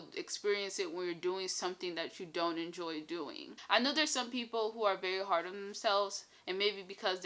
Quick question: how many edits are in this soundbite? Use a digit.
1